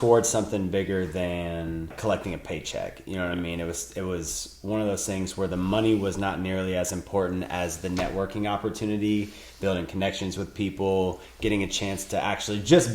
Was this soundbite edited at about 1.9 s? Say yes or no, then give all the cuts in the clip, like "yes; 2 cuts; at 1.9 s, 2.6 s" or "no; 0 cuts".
yes; 1 cut; at 1.9 s